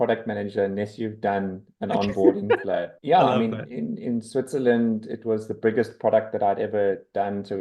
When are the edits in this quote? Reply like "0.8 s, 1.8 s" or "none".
2.9 s, 3.7 s